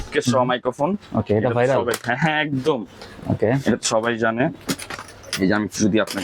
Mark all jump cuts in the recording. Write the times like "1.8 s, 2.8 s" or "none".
none